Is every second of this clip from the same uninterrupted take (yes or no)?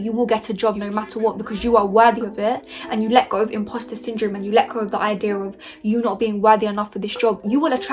yes